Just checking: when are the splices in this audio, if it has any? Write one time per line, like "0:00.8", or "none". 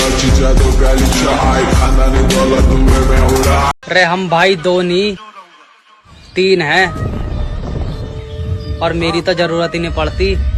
none